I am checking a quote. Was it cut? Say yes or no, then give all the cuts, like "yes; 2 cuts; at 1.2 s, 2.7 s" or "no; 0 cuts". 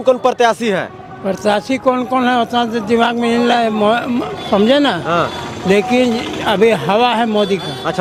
no; 0 cuts